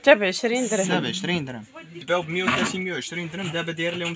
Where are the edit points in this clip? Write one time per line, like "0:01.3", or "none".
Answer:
0:02.0